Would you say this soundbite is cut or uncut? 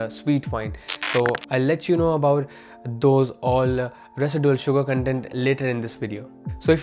uncut